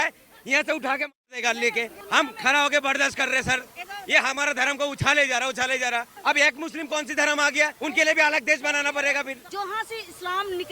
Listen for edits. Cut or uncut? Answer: cut